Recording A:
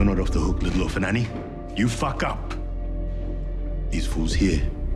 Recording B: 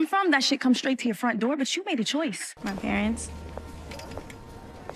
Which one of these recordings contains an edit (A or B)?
B